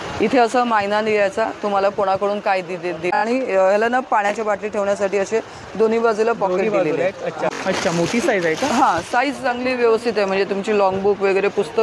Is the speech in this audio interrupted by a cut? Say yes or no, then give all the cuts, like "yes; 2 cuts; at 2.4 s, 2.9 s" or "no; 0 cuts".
yes; 2 cuts; at 3.2 s, 7.5 s